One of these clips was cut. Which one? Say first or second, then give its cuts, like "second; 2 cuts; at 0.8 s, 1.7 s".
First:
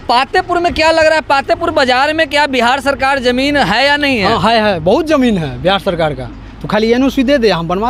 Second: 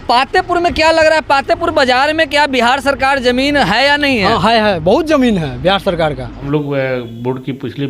second; 1 cut; at 6.4 s